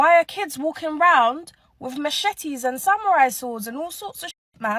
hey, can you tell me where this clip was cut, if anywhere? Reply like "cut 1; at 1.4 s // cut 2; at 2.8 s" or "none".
none